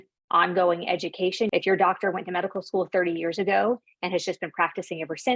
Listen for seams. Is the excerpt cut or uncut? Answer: cut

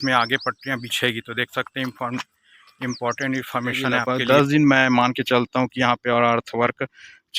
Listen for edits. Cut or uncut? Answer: cut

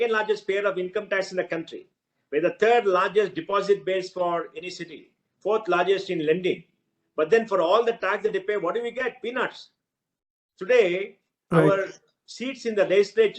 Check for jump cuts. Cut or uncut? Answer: uncut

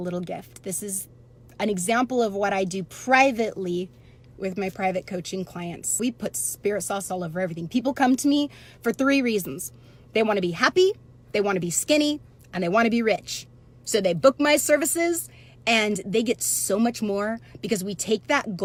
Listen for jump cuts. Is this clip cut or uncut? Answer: uncut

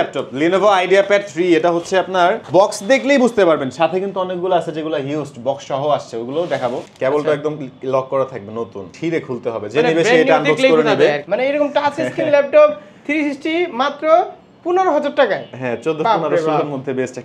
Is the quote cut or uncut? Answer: cut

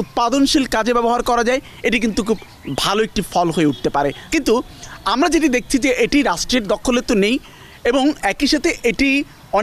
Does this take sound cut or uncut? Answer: uncut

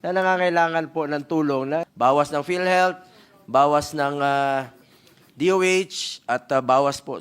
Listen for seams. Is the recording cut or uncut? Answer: cut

